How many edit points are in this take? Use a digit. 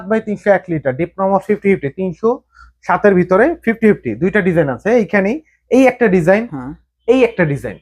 0